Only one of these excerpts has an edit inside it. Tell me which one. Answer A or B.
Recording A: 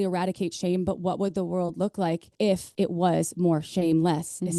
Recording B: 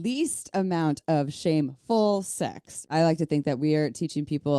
B